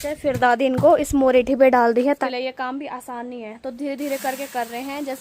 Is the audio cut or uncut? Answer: cut